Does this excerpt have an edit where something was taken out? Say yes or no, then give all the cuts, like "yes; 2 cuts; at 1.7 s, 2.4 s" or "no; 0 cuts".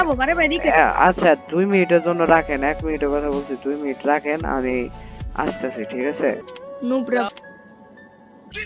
yes; 1 cut; at 6.5 s